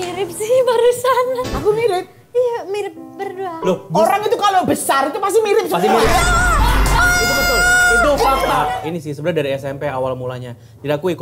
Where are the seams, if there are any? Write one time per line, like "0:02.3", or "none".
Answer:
0:01.5
0:08.7

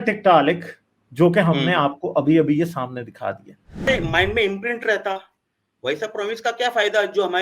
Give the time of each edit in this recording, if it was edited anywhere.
0:03.9

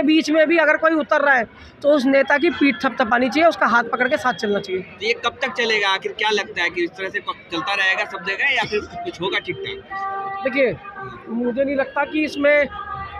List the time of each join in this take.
none

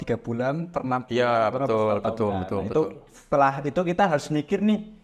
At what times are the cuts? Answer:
none

